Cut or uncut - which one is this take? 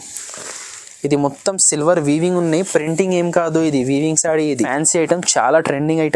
cut